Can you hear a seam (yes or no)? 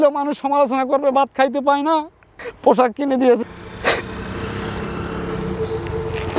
yes